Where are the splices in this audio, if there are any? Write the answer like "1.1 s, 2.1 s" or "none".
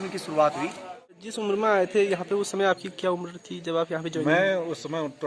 1.4 s